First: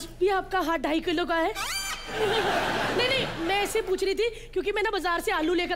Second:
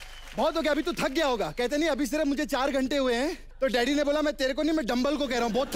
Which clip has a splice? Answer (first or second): second